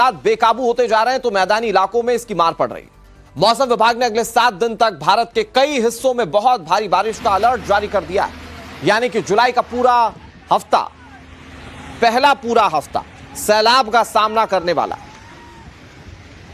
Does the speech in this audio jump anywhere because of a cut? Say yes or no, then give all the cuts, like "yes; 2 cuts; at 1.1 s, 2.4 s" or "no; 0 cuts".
yes; 1 cut; at 1.3 s